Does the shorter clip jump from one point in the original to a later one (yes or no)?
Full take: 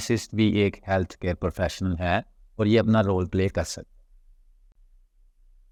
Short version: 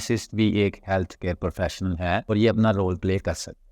yes